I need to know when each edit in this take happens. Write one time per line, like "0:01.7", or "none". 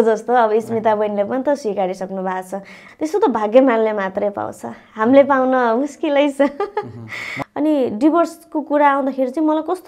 0:02.8
0:07.2